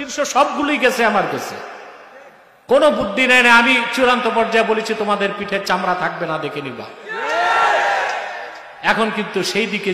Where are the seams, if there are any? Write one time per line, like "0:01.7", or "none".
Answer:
none